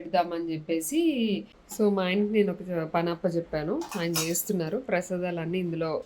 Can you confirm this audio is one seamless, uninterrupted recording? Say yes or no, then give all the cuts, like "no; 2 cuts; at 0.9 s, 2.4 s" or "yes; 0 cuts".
no; 1 cut; at 1.6 s